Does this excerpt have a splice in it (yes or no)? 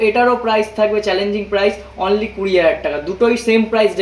no